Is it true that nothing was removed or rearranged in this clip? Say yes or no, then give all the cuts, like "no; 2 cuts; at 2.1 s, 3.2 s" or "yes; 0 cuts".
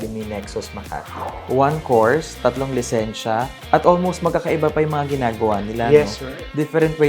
no; 1 cut; at 1.3 s